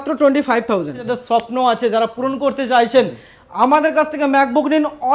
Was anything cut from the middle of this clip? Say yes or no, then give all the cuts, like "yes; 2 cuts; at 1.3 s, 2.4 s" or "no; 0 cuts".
yes; 1 cut; at 1.0 s